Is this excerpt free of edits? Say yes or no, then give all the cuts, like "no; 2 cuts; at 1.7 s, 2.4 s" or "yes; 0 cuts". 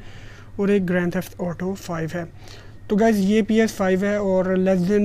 yes; 0 cuts